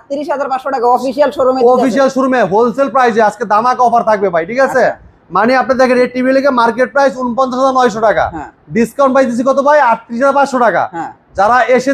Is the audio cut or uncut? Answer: uncut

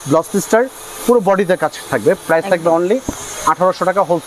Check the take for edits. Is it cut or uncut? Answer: uncut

